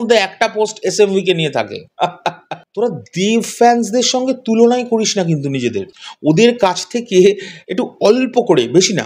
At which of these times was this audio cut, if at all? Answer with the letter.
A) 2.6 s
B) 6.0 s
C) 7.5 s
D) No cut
A